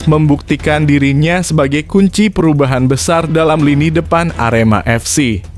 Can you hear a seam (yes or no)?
no